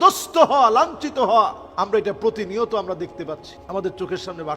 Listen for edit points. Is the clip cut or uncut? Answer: cut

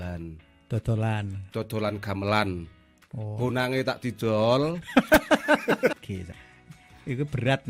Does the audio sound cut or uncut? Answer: cut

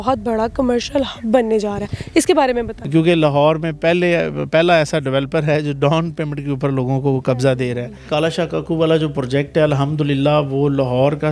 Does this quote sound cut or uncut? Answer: cut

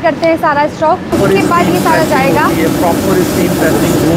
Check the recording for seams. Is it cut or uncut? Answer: cut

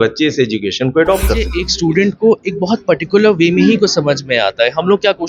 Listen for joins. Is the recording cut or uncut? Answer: cut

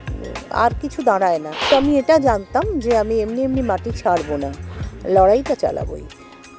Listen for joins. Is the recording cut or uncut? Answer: cut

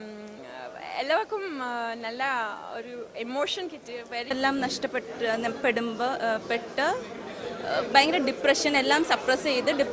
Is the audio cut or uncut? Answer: cut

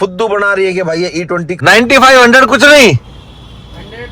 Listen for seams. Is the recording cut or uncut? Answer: cut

